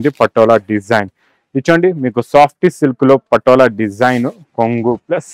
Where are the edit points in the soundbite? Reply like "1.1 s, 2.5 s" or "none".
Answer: none